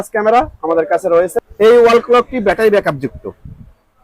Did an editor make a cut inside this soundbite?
yes; 1 cut; at 1.3 s

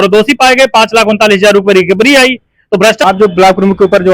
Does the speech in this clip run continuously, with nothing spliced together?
no; 1 cut; at 3.0 s

